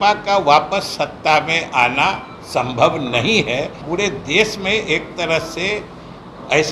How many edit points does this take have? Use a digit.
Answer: 1